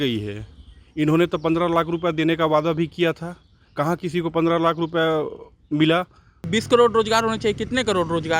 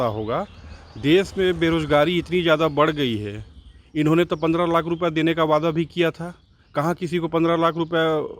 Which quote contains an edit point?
first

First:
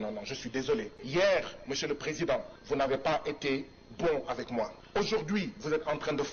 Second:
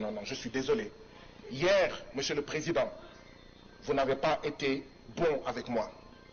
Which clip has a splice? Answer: first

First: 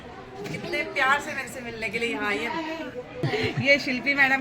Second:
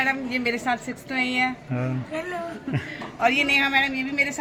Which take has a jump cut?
first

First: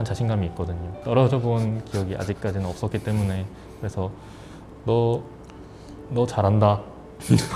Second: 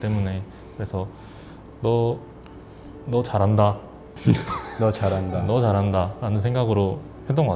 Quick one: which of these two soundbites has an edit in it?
first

